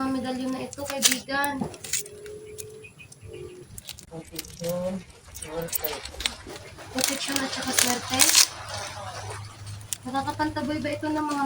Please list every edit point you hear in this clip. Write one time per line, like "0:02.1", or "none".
0:03.7

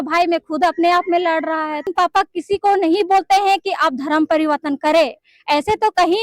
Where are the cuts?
0:01.8

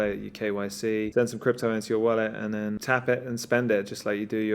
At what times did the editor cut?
0:01.1
0:02.8

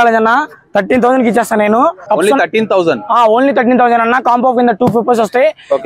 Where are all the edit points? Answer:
0:02.0

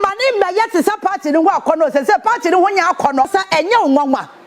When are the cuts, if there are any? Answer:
0:03.3

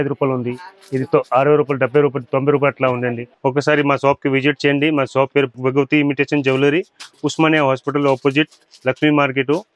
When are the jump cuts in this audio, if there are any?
none

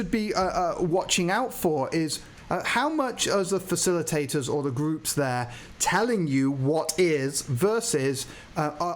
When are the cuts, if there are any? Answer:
0:02.3

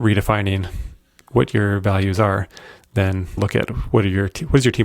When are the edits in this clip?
0:03.4

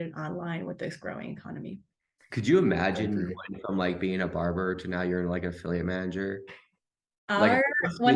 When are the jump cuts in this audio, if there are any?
none

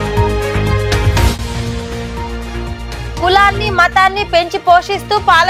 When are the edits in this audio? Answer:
0:01.0

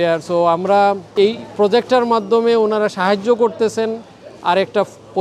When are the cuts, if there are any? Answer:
0:01.1

